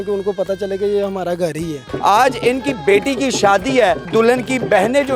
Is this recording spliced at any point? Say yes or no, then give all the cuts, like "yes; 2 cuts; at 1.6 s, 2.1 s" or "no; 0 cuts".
yes; 2 cuts; at 1.8 s, 4.1 s